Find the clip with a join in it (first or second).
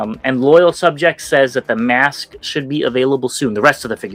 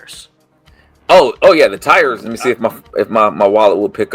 second